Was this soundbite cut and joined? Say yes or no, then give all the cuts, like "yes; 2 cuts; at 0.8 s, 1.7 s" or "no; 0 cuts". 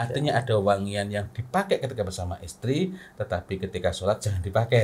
no; 0 cuts